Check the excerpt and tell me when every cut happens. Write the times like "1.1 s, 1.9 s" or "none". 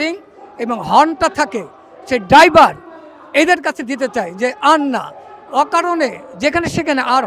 none